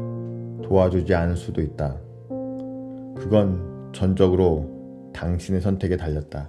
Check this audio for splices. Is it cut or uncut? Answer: uncut